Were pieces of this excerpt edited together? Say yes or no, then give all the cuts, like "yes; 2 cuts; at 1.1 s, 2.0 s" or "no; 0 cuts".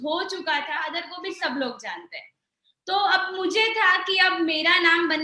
yes; 1 cut; at 1.0 s